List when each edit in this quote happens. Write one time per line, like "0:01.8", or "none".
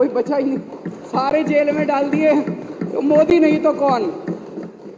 none